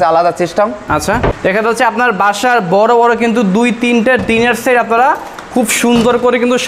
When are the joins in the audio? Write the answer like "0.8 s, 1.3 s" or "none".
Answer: 1.4 s